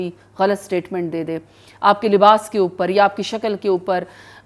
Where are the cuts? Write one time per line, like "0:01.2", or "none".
none